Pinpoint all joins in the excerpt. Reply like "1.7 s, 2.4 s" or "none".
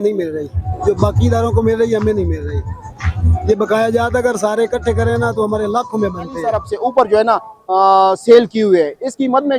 6.7 s